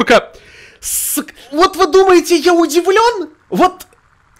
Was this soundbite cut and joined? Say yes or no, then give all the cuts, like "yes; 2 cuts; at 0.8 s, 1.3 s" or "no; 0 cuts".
yes; 1 cut; at 1.4 s